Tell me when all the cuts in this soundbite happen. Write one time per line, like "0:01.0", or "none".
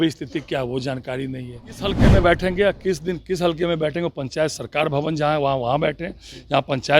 0:02.0